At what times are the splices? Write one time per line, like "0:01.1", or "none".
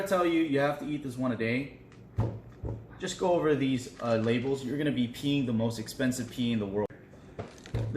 0:07.0